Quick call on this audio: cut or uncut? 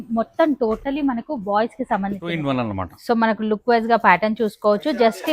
cut